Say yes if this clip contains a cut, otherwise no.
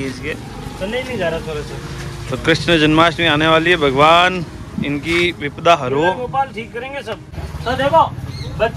yes